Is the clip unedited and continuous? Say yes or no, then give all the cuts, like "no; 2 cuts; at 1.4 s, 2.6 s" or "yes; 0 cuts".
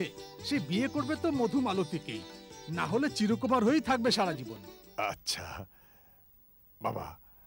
no; 1 cut; at 4.8 s